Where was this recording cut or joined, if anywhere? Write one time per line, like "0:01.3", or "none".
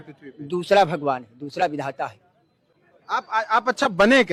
none